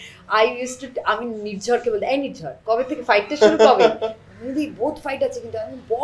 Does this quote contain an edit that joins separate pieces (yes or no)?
no